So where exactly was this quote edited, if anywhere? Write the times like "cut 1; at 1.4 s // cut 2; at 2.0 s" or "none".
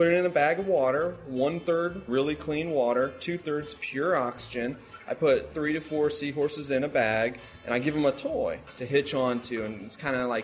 cut 1; at 2.1 s // cut 2; at 5.5 s // cut 3; at 8.7 s